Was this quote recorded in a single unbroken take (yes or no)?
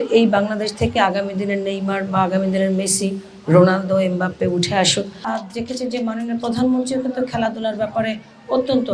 no